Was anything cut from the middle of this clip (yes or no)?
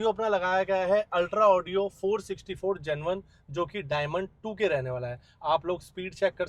no